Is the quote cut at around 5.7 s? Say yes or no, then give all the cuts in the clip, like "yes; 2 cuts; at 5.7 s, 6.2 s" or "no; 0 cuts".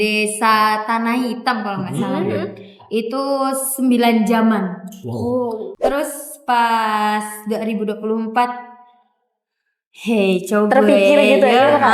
yes; 1 cut; at 5.7 s